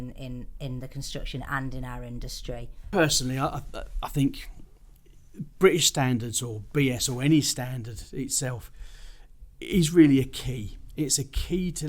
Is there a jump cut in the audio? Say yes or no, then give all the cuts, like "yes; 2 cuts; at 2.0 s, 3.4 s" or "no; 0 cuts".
yes; 1 cut; at 2.9 s